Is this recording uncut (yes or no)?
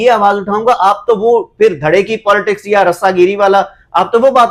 yes